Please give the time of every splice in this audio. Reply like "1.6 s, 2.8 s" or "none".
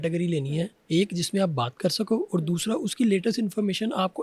none